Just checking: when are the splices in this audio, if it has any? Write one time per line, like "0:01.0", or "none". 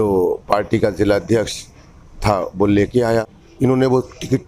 0:03.4